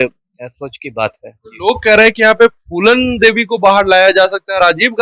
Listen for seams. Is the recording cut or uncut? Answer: uncut